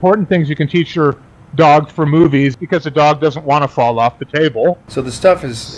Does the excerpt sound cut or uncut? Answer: cut